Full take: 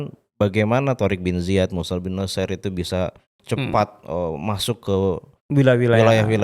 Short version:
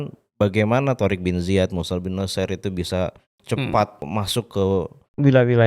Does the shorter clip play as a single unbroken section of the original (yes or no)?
no